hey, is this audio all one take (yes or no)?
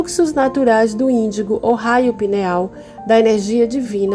yes